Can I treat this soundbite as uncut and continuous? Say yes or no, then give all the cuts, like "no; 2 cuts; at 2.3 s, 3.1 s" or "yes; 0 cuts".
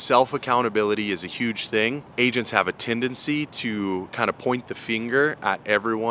no; 1 cut; at 2.1 s